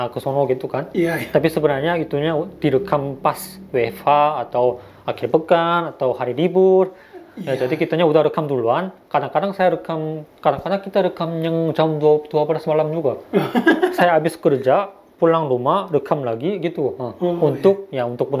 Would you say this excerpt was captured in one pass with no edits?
yes; 0 cuts

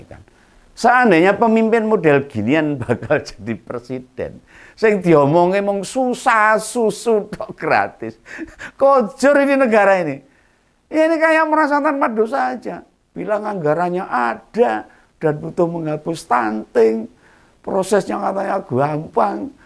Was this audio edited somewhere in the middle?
no; 0 cuts

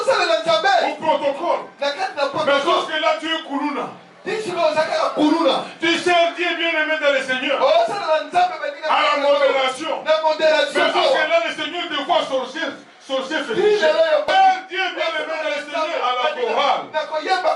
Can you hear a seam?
yes; 1 cut; at 14.3 s

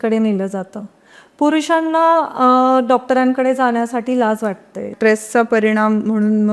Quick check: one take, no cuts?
no; 1 cut; at 4.9 s

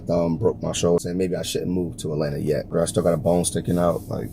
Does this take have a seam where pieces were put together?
yes; 2 cuts; at 1.0 s, 2.7 s

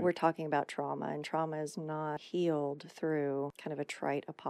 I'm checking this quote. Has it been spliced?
yes; 2 cuts; at 2.2 s, 3.6 s

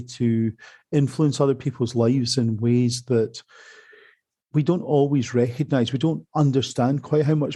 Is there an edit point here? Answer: no; 0 cuts

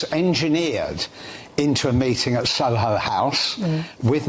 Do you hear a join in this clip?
no; 0 cuts

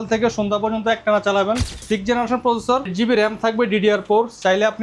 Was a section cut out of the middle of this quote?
yes; 2 cuts; at 1.8 s, 2.9 s

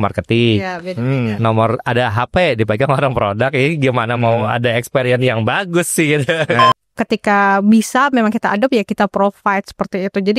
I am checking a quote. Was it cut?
yes; 1 cut; at 6.7 s

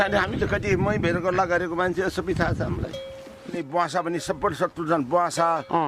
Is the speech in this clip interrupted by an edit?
yes; 1 cut; at 3.5 s

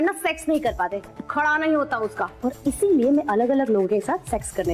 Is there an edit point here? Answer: no; 0 cuts

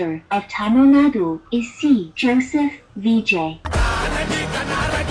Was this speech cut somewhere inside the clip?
no; 0 cuts

